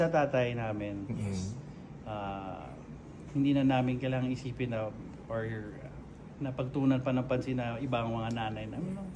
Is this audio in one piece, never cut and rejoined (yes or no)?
yes